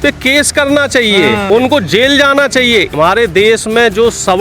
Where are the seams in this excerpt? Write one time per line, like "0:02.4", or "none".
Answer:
0:01.5
0:02.9